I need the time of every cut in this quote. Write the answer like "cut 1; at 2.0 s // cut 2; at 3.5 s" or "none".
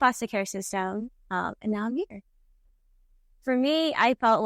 cut 1; at 2.7 s